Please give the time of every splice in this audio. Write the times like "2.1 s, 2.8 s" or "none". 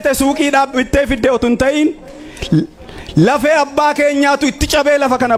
none